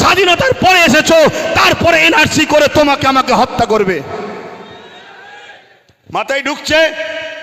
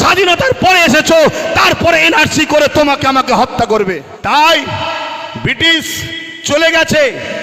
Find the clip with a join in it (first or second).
second